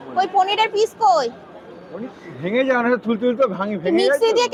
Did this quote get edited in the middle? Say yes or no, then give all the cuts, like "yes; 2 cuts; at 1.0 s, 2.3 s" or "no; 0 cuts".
no; 0 cuts